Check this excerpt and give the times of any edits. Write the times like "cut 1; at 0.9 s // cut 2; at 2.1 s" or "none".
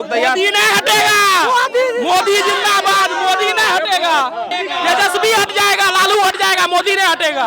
cut 1; at 4.5 s